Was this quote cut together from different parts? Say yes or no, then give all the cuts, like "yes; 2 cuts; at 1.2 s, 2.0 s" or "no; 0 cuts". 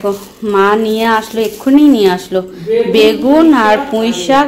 no; 0 cuts